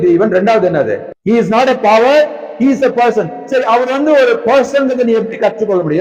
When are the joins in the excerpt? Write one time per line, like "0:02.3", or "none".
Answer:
0:01.1